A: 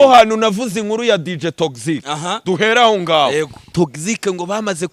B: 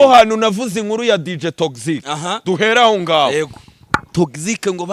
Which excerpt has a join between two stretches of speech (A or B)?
A